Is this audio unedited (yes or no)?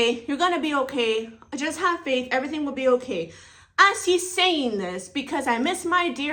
yes